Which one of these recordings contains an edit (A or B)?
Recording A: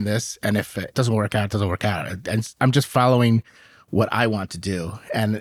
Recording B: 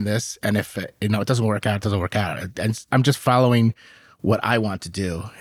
A